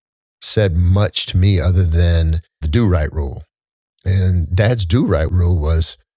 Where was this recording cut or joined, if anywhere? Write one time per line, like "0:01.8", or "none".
0:02.6
0:05.3